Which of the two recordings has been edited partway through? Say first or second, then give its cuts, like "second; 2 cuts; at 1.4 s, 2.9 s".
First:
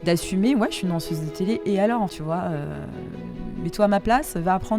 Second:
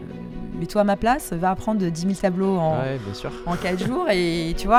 first; 1 cut; at 2.1 s